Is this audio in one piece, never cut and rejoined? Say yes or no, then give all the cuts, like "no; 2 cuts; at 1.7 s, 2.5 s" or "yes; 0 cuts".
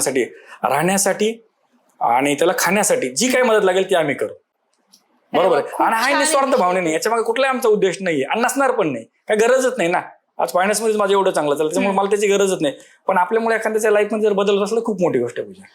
yes; 0 cuts